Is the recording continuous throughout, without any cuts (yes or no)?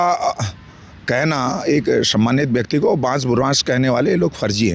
yes